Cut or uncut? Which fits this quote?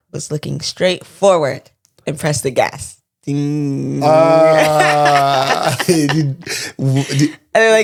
uncut